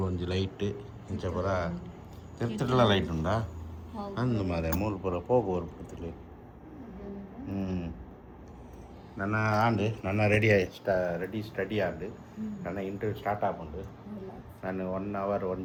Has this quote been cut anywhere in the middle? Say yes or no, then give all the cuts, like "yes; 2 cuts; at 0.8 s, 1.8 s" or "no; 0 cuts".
no; 0 cuts